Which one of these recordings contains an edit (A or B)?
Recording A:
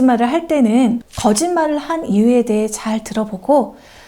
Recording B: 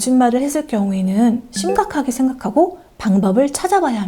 A